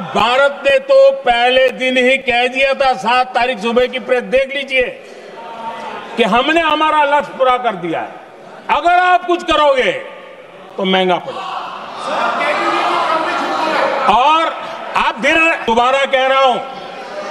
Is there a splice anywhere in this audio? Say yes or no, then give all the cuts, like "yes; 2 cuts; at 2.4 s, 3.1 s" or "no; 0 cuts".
yes; 1 cut; at 15.6 s